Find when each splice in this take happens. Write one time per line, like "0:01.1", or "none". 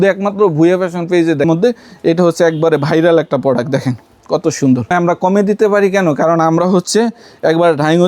0:01.5
0:04.9

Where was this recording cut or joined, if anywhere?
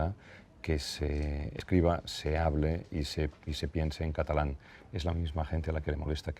0:01.6

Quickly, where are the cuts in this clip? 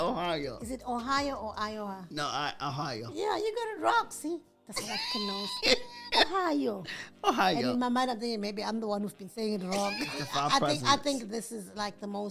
0:10.2

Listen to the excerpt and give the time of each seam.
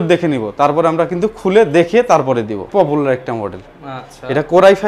0:02.7

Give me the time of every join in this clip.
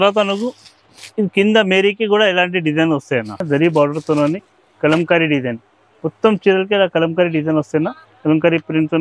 0:03.4
0:08.1

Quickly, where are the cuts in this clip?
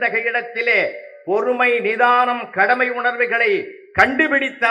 none

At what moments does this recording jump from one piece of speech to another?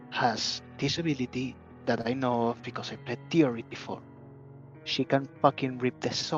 none

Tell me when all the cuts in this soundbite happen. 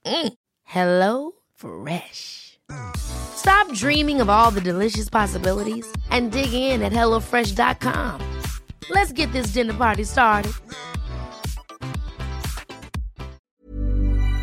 0:13.5

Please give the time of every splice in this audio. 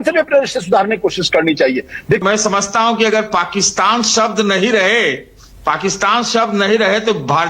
0:02.2

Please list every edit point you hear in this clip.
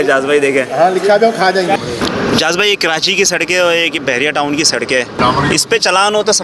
0:01.8
0:05.2

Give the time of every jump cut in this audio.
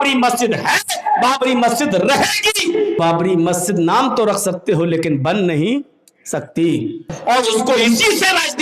0:03.0
0:07.2

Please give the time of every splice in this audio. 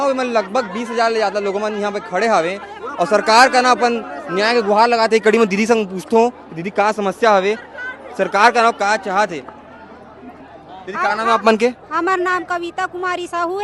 none

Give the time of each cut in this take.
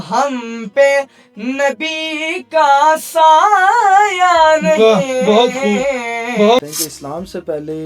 0:06.6

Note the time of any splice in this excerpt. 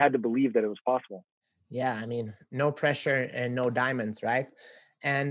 none

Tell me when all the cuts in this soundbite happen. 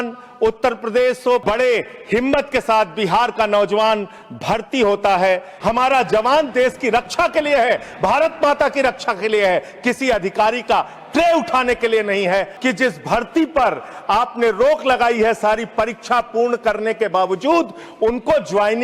0:01.4
0:05.5
0:12.5

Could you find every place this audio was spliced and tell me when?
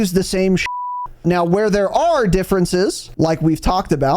0:01.2
0:03.0

